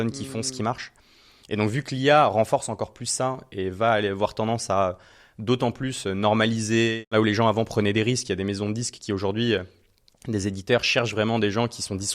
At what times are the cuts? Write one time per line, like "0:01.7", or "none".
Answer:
0:07.1

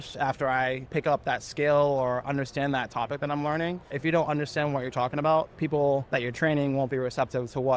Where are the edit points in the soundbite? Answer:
0:00.8
0:03.9
0:06.1

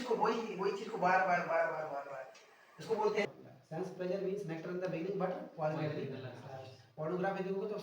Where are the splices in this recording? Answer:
0:03.2

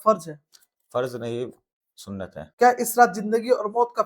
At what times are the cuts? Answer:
0:02.5

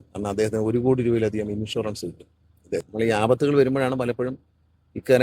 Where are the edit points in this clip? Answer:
0:02.9

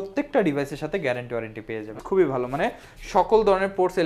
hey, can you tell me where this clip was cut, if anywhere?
0:01.9

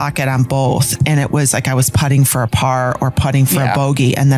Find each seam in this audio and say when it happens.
0:01.0

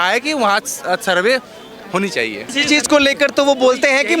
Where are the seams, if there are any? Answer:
0:02.5

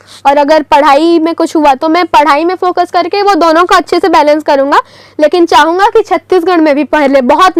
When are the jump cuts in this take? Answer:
none

